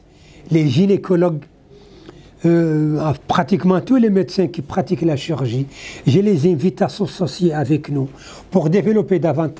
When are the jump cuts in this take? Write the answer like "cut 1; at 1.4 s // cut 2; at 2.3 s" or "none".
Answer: none